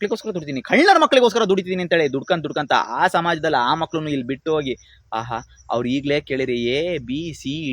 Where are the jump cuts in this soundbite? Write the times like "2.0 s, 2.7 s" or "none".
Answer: none

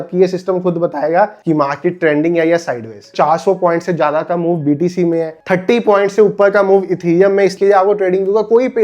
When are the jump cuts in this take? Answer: 3.1 s, 5.4 s, 7.6 s

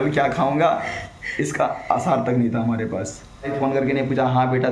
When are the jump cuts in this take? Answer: 3.5 s

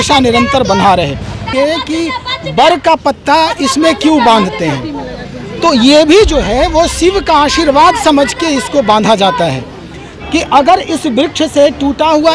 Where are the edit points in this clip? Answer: 1.5 s

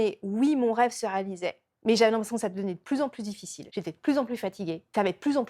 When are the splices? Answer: none

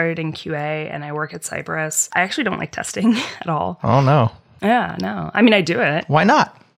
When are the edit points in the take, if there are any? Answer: 2.0 s

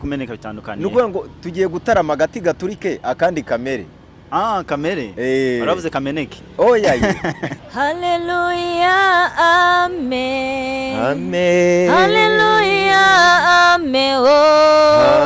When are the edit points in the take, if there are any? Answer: 7.5 s

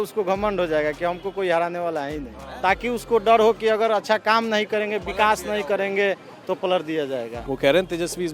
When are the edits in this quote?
2.4 s, 7.4 s

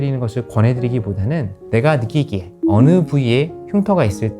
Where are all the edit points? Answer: 1.6 s

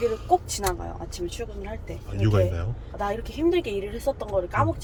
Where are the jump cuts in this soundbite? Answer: none

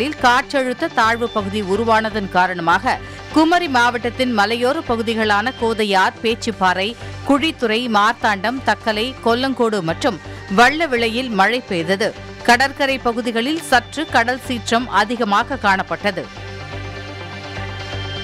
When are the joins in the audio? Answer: none

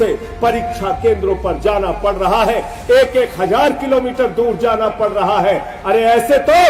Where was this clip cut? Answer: none

